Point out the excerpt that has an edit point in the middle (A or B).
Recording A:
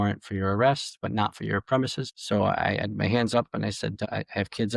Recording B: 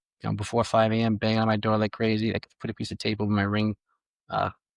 A